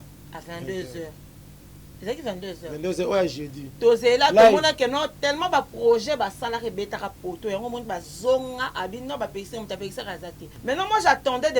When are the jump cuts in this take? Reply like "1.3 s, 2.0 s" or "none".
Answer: 10.5 s